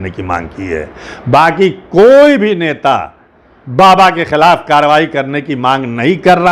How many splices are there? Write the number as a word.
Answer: zero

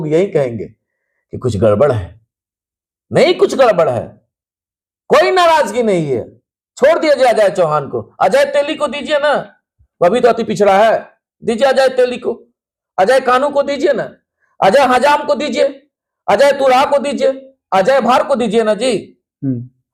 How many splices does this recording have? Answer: zero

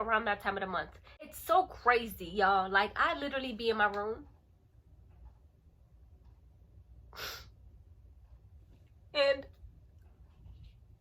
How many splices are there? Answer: one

